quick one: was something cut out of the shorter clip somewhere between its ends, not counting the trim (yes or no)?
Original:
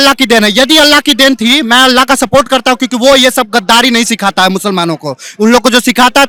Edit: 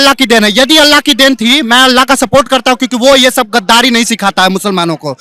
no